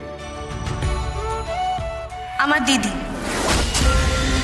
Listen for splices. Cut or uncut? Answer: uncut